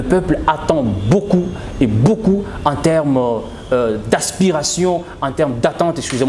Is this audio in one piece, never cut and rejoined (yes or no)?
yes